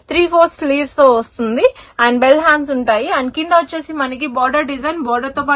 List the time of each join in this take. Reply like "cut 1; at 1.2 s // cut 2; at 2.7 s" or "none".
none